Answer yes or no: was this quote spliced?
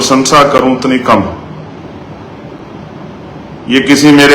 no